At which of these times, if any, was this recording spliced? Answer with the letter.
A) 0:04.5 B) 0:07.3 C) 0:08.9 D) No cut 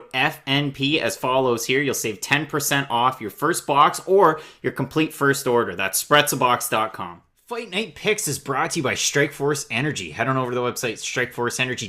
B